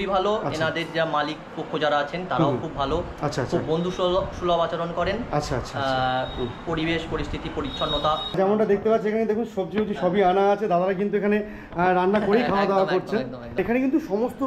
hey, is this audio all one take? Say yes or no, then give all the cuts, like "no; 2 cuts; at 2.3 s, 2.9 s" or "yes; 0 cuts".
no; 2 cuts; at 8.3 s, 13.6 s